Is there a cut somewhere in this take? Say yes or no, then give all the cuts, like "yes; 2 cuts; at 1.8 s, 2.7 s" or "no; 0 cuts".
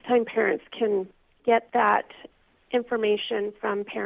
no; 0 cuts